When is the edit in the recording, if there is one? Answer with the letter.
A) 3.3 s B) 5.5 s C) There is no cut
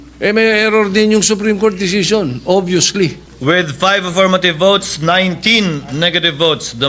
A